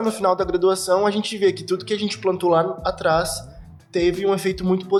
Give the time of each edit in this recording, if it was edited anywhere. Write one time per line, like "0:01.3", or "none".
none